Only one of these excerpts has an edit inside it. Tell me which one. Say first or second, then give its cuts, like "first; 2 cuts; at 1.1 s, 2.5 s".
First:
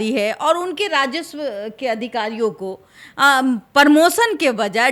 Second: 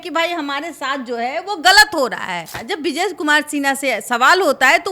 second; 1 cut; at 2.4 s